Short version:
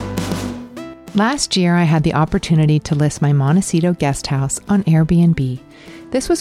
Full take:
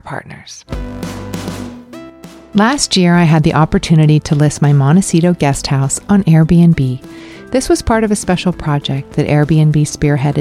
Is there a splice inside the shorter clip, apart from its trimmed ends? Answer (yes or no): yes